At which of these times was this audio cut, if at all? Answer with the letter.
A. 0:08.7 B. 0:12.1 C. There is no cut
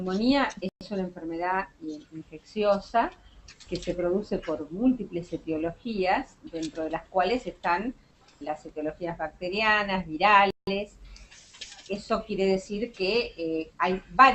B